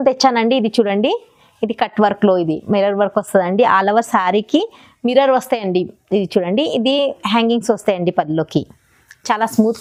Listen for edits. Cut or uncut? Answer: uncut